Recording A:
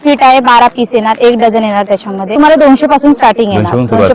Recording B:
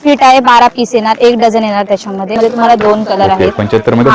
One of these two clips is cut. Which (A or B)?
B